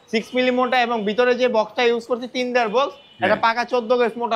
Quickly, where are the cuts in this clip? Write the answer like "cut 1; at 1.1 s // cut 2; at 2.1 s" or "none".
none